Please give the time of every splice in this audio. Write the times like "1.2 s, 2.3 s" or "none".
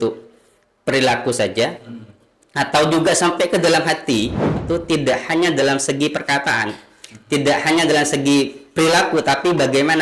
4.6 s